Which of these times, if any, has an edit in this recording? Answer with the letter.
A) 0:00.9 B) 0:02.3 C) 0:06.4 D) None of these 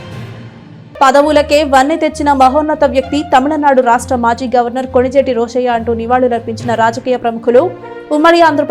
A